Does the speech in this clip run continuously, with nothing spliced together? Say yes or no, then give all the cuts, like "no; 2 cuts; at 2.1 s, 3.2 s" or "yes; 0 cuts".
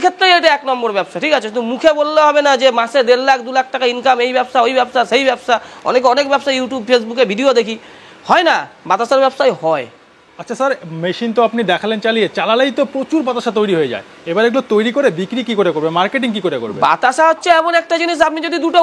yes; 0 cuts